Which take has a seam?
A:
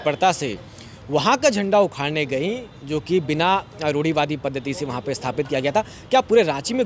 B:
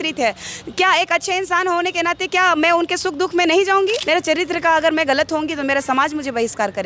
B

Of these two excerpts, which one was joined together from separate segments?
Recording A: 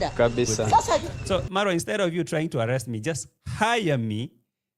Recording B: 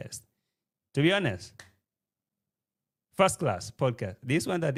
A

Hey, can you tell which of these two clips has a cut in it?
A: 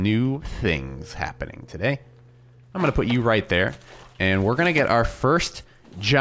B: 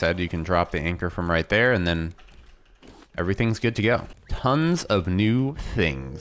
B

